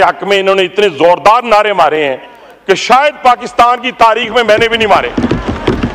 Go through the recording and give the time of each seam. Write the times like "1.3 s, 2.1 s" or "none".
none